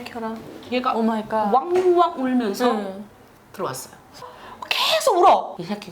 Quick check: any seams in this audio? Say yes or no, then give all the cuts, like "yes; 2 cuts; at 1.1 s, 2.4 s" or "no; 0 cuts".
yes; 1 cut; at 4.2 s